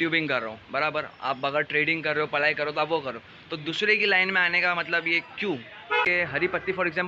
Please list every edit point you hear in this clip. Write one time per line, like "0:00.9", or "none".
0:06.1